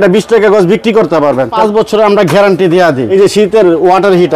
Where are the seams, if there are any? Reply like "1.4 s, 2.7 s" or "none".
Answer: 1.5 s, 3.0 s

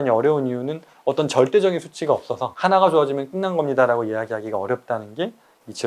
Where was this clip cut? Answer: none

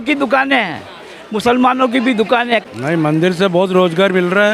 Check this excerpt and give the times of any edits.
2.6 s

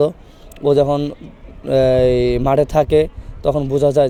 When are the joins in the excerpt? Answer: none

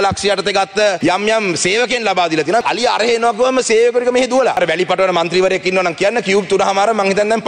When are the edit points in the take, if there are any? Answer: 1.0 s, 2.6 s, 4.6 s

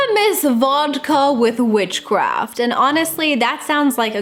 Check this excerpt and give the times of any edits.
none

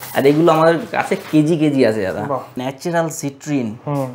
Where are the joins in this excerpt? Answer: 2.5 s

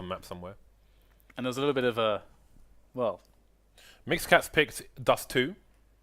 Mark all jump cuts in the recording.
4.7 s

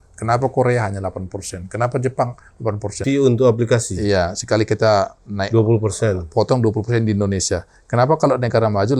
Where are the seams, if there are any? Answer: 3.0 s

